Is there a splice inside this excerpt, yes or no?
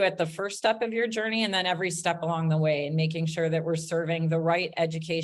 no